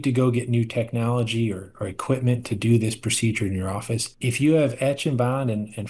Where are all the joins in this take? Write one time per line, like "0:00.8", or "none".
0:04.1